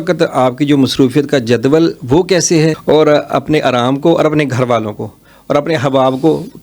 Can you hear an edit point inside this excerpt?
yes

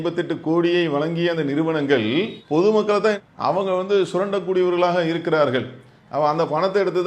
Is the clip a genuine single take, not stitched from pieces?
yes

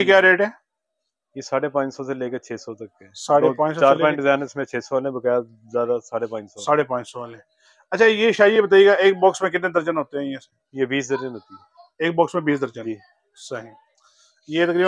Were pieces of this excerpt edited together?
no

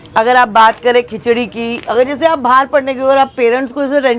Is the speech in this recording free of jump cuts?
yes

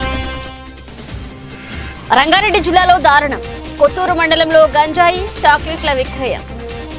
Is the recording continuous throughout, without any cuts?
no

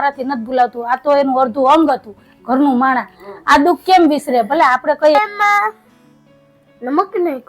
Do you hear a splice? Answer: yes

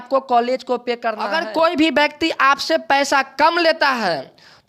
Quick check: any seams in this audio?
yes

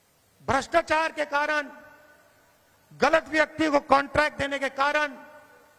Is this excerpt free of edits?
yes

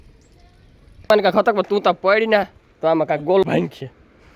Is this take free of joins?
no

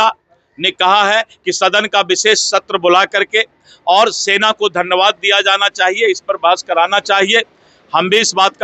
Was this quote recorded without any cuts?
yes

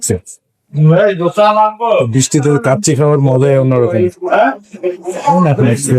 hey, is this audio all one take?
yes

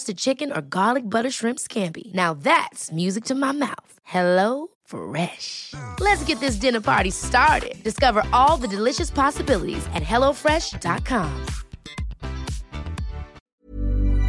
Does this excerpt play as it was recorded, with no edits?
no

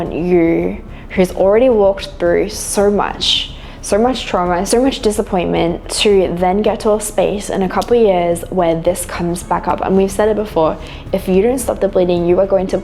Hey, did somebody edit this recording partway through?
no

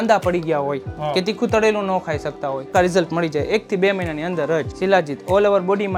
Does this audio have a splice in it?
yes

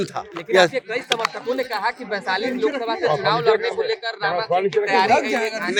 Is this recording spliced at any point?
no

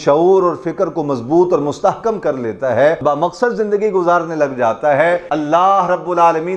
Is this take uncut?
no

